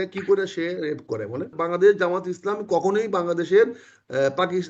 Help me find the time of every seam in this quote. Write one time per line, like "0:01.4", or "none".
0:01.6

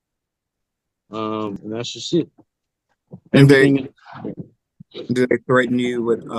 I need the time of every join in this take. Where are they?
0:01.6

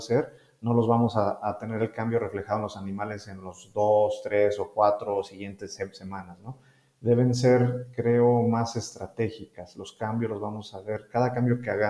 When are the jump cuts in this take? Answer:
none

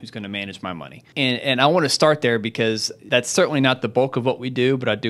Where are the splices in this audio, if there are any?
0:02.9

